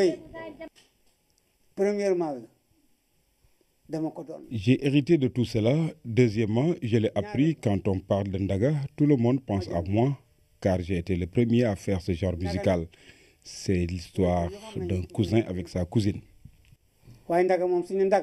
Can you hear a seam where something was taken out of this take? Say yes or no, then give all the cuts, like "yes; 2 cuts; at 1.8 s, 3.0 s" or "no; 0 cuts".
no; 0 cuts